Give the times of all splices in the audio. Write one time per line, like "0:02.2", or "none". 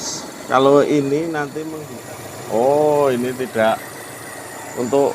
0:01.6